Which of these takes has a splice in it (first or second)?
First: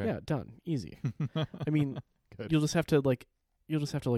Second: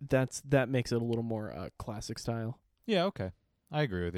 second